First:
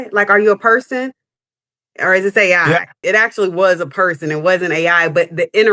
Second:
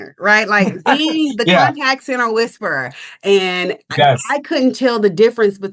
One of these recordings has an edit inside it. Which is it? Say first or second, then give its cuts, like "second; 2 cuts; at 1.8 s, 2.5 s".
first; 1 cut; at 3.0 s